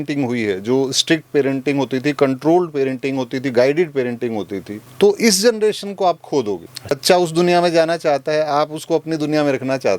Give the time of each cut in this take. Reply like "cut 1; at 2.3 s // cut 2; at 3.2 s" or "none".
cut 1; at 6.9 s